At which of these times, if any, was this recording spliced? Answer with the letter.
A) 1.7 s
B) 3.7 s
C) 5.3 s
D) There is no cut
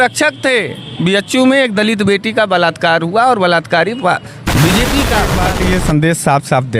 C